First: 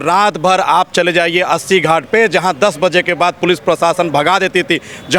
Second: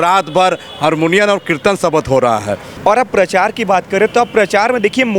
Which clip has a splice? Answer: second; 1 cut; at 2.7 s

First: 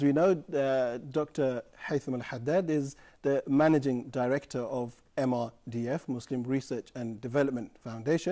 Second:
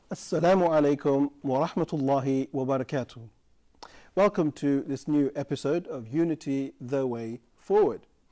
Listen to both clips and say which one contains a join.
first; 1 cut; at 5.1 s

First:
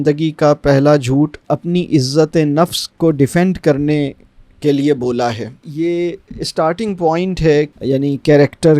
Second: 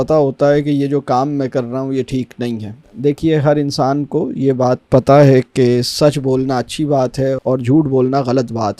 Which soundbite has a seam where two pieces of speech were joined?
first; 1 cut; at 5.6 s

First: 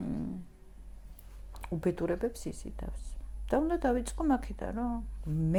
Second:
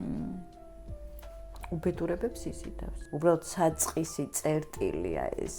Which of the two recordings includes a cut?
second; 1 cut; at 3.0 s

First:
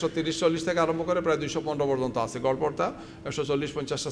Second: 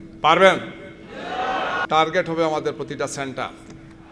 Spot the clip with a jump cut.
second; 1 cut; at 1.8 s

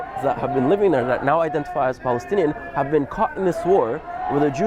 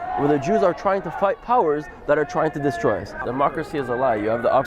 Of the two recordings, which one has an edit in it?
second; 1 cut; at 3.2 s

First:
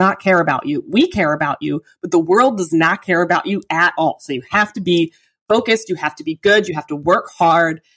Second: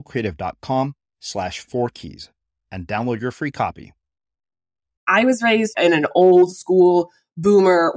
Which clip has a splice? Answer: second; 2 cuts; at 5.0 s, 5.7 s

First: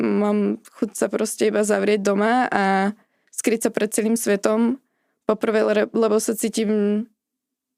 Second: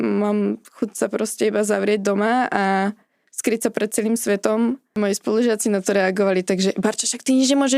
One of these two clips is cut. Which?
second; 1 cut; at 5.0 s

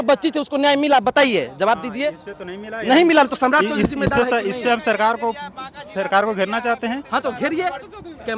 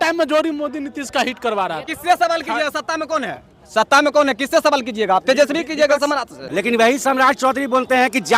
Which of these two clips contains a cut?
second; 2 cuts; at 1.9 s, 6.5 s

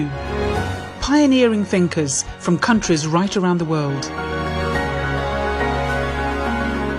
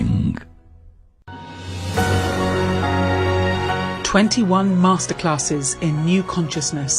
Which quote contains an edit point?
second; 1 cut; at 1.1 s

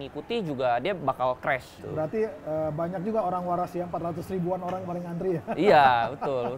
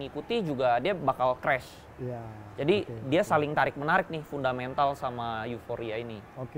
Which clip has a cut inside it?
first; 1 cut; at 1.8 s

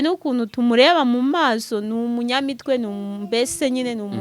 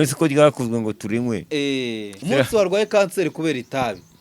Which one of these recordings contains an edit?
second; 1 cut; at 2.1 s

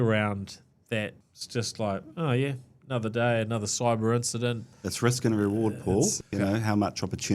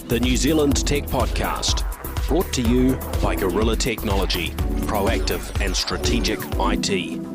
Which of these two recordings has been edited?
first; 3 cuts; at 1.2 s, 4.7 s, 6.3 s

